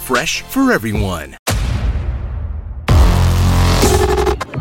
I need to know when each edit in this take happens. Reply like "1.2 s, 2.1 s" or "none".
1.3 s

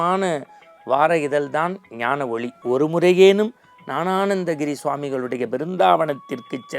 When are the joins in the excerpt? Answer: 2.6 s

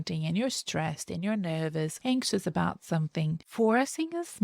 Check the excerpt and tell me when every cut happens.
1.9 s, 3.4 s

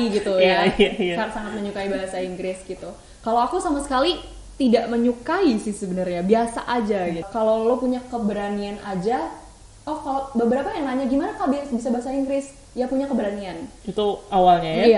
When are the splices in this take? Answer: 7.3 s

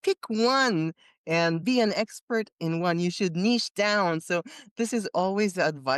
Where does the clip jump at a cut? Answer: 1.6 s

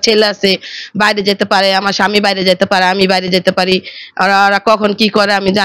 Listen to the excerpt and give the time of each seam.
none

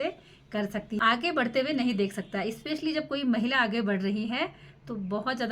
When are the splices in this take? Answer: 0.9 s

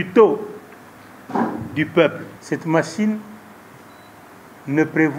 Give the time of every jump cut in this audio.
2.3 s

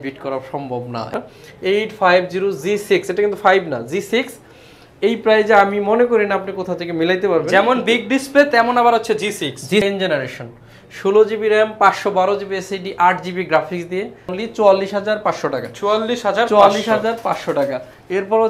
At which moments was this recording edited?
1.1 s, 9.8 s, 14.4 s

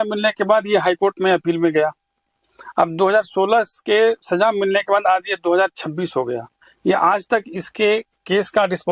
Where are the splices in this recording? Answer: none

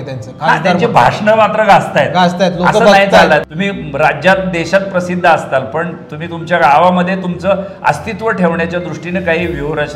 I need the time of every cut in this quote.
3.5 s

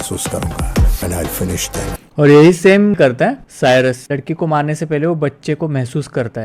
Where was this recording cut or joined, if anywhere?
2.9 s

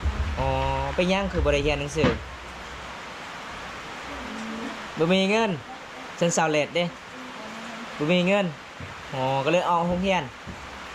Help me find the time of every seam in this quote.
none

